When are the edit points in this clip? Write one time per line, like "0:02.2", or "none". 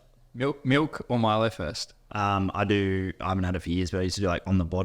0:02.1